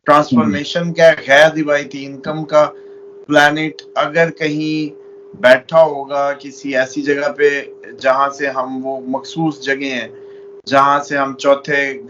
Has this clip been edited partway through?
no; 0 cuts

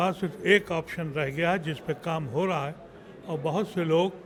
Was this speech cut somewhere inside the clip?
no; 0 cuts

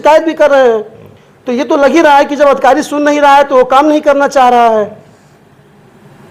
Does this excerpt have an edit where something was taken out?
no; 0 cuts

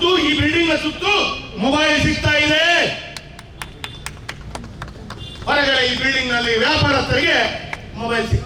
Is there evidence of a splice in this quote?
no; 0 cuts

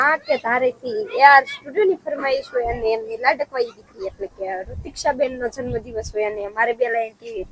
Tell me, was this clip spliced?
no; 0 cuts

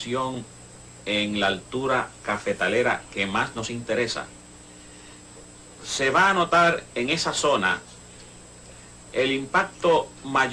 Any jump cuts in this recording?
no; 0 cuts

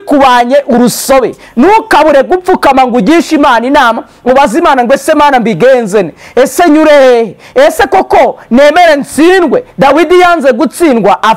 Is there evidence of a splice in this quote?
no; 0 cuts

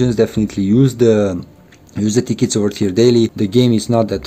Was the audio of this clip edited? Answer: yes; 1 cut; at 3.3 s

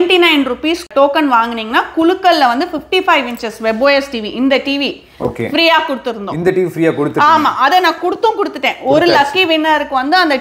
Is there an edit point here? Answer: no; 0 cuts

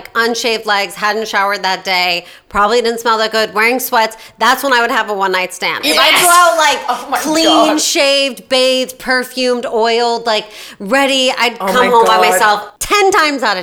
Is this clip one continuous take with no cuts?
no; 1 cut; at 12.7 s

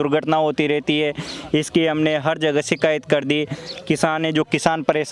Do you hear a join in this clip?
no; 0 cuts

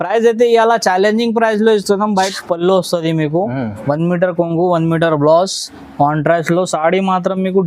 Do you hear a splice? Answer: yes; 1 cut; at 2.3 s

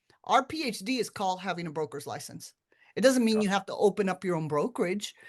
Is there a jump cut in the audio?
no; 0 cuts

